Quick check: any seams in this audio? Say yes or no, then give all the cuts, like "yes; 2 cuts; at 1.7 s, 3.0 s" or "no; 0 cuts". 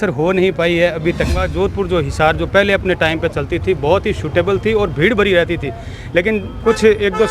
yes; 1 cut; at 1.4 s